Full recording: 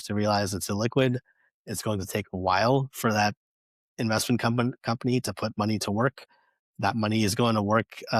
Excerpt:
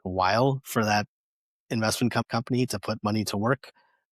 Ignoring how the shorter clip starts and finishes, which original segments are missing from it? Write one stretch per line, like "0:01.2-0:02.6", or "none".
0:04.5-0:04.8